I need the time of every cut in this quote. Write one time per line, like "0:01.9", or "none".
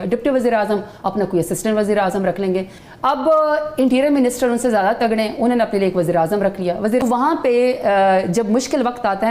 0:02.8
0:07.0